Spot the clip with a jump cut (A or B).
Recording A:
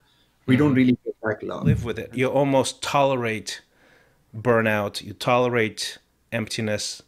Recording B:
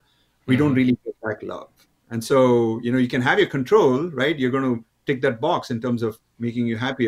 A